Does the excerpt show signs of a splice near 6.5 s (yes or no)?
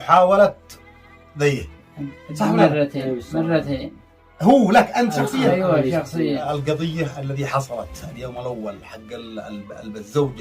yes